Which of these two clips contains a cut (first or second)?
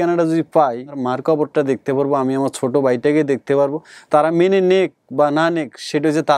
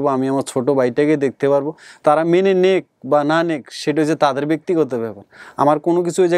first